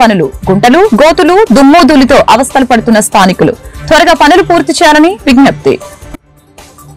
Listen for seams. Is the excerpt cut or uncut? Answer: uncut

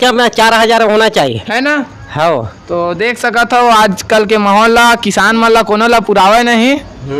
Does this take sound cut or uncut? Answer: uncut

